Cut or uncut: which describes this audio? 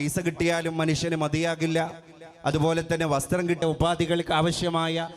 cut